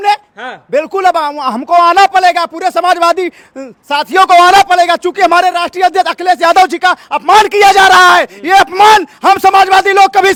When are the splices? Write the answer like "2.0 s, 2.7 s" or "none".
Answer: none